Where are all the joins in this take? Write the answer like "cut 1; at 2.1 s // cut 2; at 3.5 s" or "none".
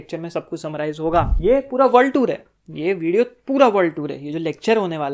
cut 1; at 1.3 s